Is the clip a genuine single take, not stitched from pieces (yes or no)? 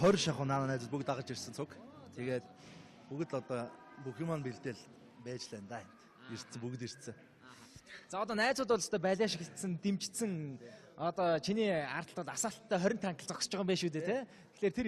no